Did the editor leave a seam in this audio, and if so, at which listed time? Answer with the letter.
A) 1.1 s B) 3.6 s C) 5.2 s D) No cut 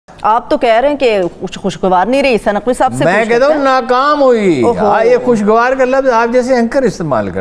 D